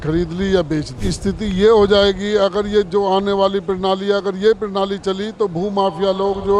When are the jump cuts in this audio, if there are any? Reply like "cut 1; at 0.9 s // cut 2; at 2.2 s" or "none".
cut 1; at 1.0 s